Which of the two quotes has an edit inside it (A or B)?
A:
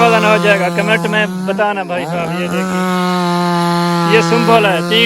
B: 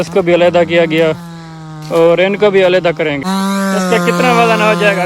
B